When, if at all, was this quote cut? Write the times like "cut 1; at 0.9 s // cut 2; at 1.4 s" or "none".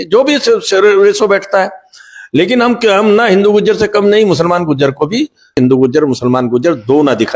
cut 1; at 5.5 s